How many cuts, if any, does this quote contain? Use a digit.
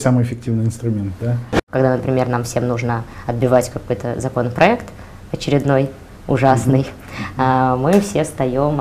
1